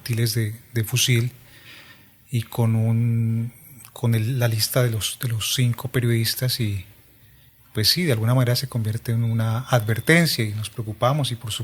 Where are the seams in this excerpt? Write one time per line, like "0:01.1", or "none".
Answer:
none